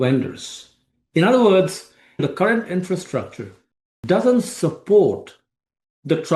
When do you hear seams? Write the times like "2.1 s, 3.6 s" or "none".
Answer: 2.2 s

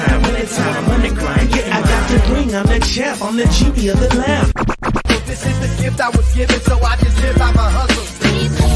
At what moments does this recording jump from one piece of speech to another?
none

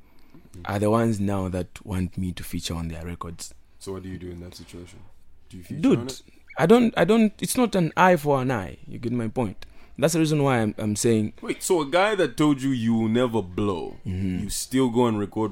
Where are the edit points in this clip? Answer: none

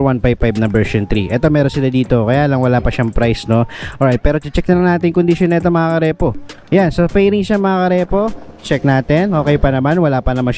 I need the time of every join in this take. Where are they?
none

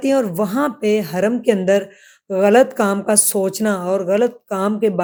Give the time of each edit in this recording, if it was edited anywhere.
none

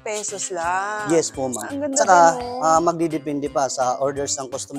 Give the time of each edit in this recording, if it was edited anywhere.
none

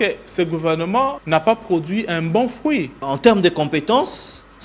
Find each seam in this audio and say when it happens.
1.2 s, 3.0 s

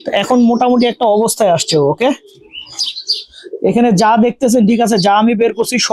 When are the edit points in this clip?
none

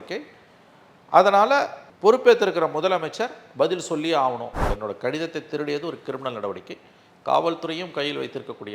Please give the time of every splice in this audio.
4.6 s

